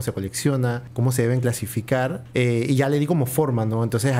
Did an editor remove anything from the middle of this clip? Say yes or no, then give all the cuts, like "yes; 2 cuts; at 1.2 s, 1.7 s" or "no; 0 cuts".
yes; 2 cuts; at 0.9 s, 2.2 s